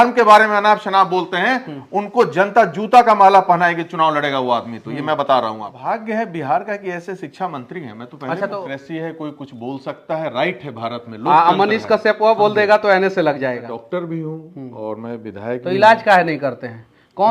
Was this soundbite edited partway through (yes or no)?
yes